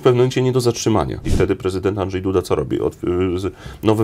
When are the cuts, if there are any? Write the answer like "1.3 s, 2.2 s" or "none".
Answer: 1.3 s